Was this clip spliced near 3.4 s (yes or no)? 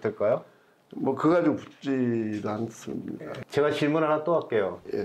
yes